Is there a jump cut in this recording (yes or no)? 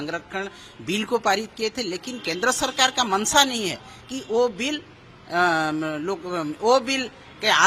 no